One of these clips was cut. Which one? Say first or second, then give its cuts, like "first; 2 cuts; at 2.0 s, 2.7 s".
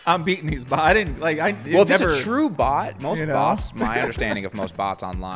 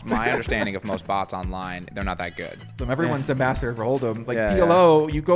second; 1 cut; at 2.8 s